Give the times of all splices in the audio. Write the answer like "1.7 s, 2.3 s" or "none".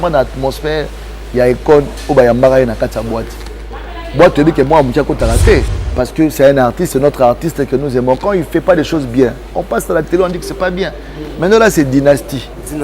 5.8 s